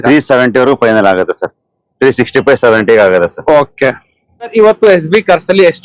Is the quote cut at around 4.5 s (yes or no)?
yes